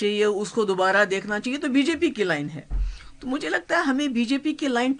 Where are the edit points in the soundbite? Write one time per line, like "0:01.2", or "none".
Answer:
none